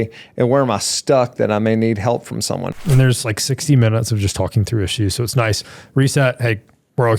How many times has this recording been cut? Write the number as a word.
one